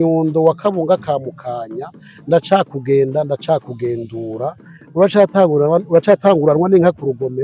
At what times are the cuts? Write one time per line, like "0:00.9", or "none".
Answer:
none